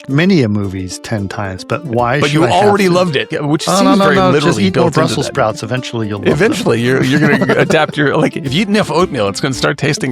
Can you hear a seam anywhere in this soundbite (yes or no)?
yes